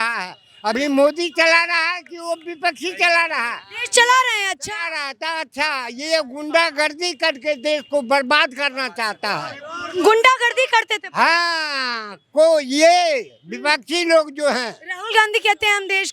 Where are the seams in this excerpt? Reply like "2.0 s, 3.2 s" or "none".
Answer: none